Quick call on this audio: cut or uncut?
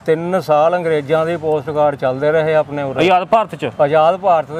uncut